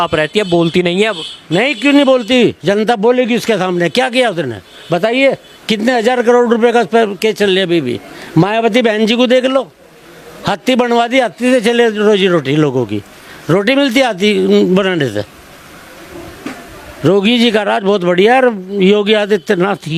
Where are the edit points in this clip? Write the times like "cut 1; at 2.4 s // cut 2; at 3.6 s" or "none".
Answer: none